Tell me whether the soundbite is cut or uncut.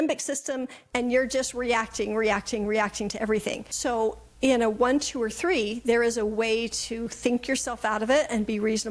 uncut